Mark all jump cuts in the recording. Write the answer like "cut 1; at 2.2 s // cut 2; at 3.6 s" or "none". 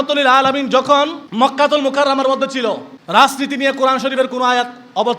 cut 1; at 1.2 s // cut 2; at 2.9 s